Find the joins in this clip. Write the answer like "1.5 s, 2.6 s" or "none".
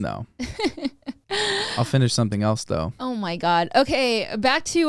none